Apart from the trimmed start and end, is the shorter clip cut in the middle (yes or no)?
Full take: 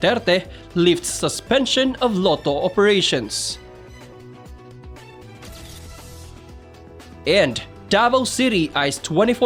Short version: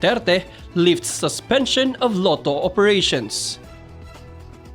yes